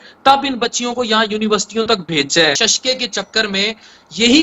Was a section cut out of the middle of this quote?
yes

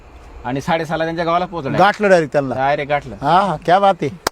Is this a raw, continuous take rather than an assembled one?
yes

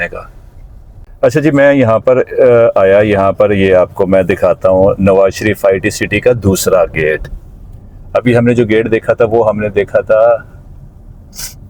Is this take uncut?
yes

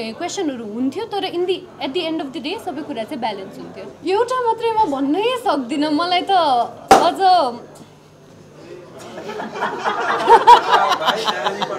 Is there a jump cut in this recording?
yes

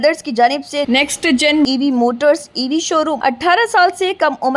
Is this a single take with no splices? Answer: no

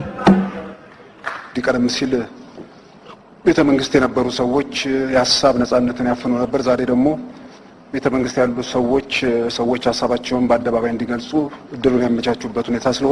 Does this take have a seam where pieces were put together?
yes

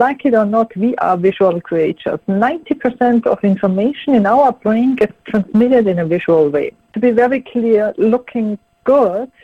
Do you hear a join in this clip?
yes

